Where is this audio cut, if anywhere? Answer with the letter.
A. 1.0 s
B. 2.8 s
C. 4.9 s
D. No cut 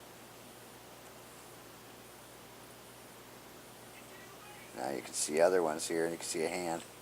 C